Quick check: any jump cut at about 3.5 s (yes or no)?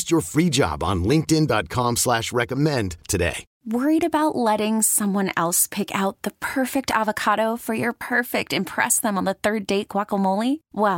yes